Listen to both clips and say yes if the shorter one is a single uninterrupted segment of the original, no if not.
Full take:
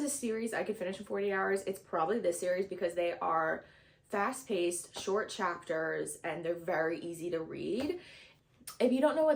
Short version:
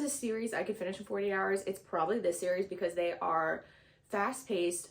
yes